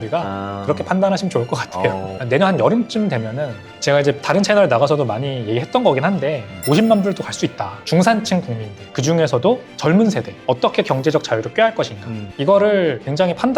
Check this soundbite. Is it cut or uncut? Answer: cut